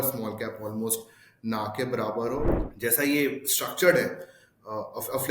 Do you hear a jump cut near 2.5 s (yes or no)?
yes